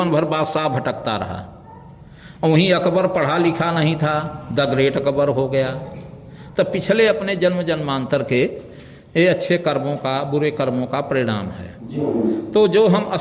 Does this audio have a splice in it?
no; 0 cuts

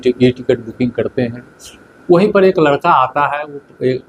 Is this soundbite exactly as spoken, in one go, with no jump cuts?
yes; 0 cuts

